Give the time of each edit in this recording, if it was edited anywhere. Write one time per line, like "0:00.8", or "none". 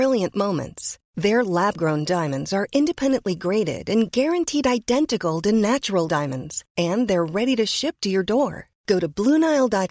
none